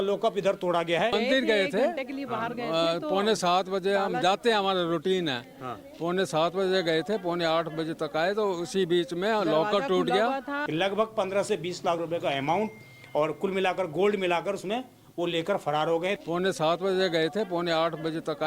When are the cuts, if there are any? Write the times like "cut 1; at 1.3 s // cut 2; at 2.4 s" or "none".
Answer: cut 1; at 1.1 s // cut 2; at 10.6 s // cut 3; at 16.2 s